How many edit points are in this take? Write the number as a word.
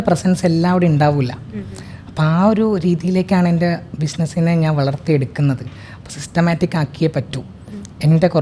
zero